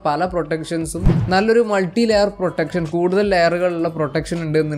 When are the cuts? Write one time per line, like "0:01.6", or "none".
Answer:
0:01.1